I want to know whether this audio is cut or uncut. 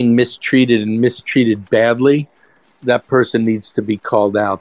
uncut